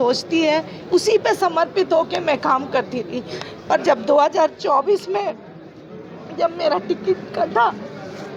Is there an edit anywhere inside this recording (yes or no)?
no